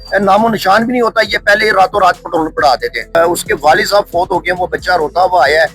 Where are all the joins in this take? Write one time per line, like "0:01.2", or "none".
0:03.2